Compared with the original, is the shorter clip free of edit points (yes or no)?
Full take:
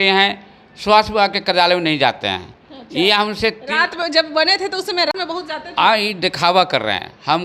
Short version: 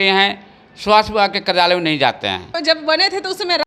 no